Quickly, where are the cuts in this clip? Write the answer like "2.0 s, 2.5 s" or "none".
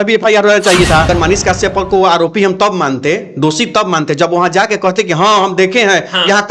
1.1 s